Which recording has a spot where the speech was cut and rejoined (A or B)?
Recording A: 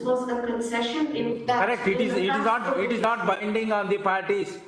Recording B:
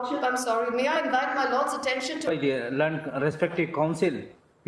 B